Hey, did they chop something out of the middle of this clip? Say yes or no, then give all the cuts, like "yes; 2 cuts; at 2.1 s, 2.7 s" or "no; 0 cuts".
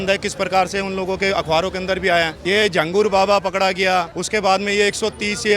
yes; 2 cuts; at 2.4 s, 4.2 s